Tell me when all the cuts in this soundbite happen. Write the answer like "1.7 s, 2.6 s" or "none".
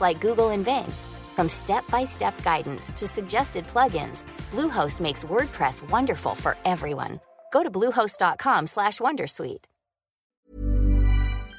10.4 s

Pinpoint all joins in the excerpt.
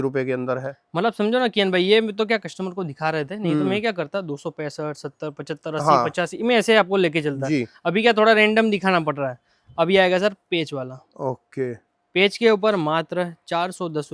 none

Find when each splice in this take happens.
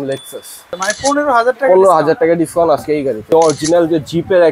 0.8 s, 3.3 s

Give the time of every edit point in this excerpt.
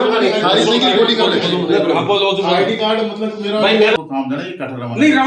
4.0 s

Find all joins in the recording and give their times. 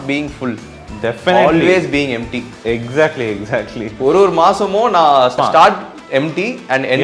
5.4 s

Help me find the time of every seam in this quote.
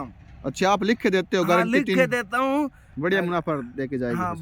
2.8 s

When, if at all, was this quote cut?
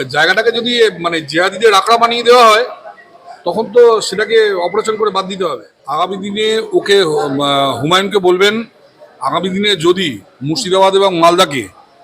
5.6 s

